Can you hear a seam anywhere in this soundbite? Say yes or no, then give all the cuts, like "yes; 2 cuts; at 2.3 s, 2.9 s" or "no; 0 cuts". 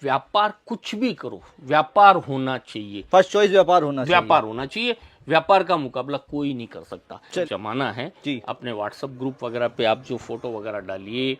yes; 1 cut; at 7.4 s